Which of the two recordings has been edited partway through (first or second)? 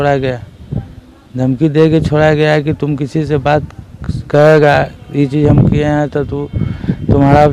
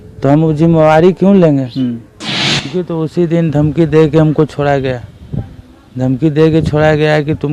second